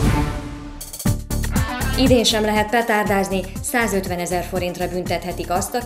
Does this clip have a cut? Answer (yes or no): yes